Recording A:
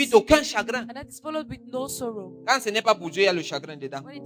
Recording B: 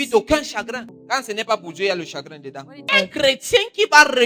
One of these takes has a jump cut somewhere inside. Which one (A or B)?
B